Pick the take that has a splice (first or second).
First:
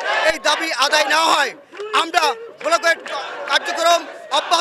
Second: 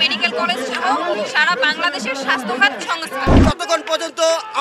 second